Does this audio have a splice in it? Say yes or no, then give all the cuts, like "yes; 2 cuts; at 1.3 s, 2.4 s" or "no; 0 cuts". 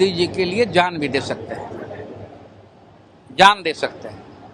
no; 0 cuts